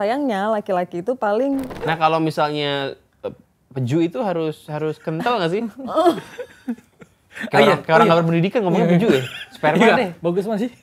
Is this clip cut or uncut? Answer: cut